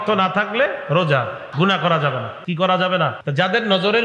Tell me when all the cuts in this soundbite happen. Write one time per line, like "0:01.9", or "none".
0:01.5
0:02.3
0:03.2